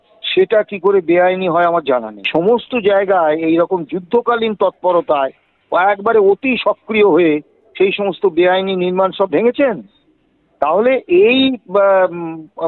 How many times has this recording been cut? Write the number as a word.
one